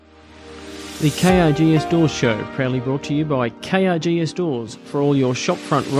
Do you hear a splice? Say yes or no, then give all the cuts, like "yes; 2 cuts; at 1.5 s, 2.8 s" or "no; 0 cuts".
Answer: yes; 1 cut; at 0.9 s